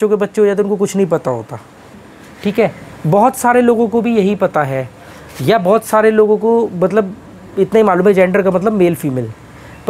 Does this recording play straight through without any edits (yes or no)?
no